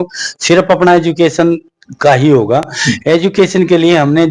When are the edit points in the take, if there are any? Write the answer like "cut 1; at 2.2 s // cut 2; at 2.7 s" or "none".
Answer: none